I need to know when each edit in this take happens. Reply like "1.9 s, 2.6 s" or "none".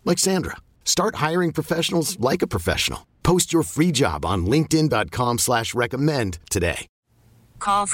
6.9 s